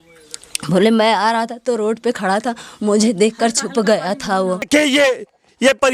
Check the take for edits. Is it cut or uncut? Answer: cut